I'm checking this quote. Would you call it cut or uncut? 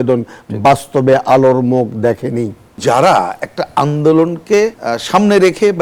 cut